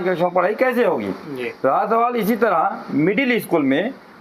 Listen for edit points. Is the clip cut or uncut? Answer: uncut